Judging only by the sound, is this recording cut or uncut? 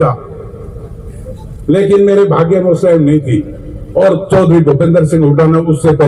uncut